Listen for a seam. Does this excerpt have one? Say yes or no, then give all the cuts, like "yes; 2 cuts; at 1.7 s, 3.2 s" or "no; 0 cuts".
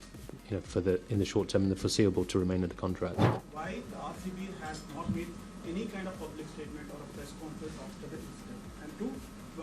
yes; 1 cut; at 3.1 s